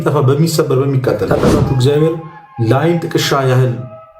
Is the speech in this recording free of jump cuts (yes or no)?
no